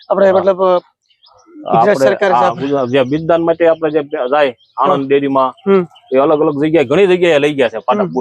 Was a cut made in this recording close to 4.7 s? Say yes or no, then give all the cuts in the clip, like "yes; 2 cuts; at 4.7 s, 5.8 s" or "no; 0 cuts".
no; 0 cuts